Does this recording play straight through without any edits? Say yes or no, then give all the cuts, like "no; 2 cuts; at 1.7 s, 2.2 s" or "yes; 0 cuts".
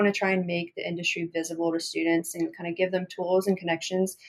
yes; 0 cuts